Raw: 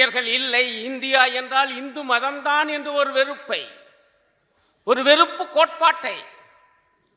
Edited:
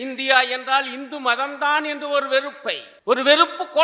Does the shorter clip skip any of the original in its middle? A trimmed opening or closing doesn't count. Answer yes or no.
yes